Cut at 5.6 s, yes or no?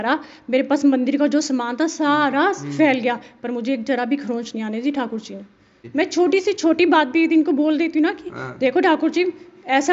yes